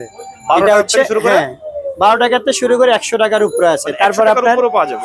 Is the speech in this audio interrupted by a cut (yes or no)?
no